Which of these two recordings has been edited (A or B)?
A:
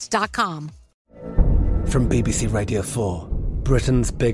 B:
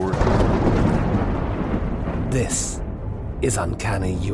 A